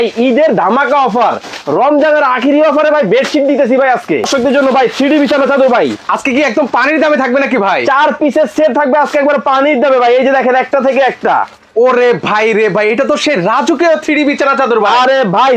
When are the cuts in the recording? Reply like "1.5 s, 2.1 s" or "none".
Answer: 4.3 s